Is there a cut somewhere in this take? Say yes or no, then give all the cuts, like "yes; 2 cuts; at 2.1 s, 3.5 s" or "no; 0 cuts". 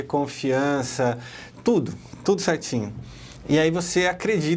no; 0 cuts